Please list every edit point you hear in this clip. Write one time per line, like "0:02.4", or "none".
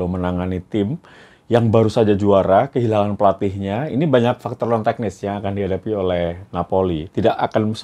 none

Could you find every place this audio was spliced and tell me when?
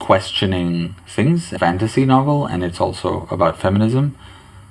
0:01.5

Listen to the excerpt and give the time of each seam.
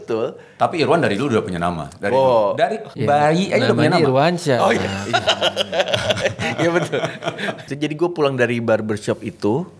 0:02.9
0:07.6

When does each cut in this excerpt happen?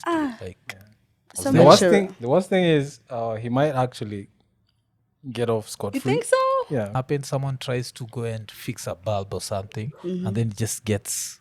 0:06.9

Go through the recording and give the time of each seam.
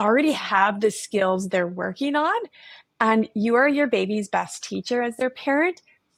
none

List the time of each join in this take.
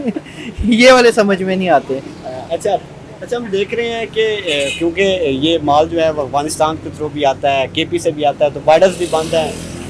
none

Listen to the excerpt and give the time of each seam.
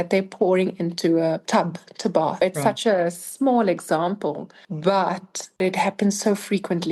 none

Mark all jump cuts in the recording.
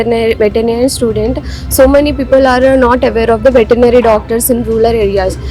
none

